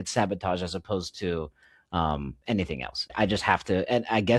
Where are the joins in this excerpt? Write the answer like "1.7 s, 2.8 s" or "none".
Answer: 3.1 s